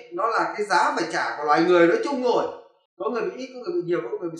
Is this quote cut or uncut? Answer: uncut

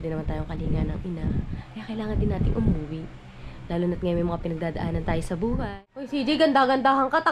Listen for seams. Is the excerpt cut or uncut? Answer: cut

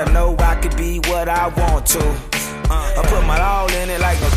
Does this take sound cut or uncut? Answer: uncut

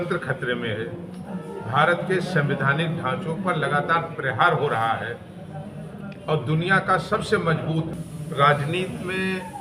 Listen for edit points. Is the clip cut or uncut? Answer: cut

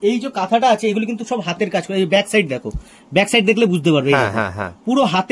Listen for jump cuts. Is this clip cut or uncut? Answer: uncut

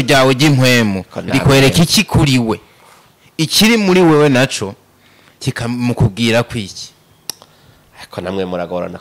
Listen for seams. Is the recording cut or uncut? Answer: uncut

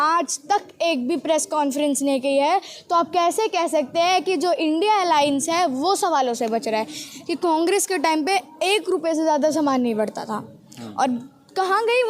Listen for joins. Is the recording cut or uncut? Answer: cut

